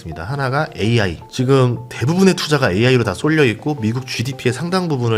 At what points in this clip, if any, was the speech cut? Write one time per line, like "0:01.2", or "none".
none